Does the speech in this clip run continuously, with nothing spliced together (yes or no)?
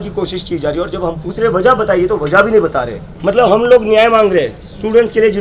no